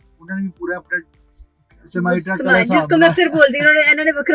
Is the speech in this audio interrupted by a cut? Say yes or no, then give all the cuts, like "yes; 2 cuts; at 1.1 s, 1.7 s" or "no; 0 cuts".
no; 0 cuts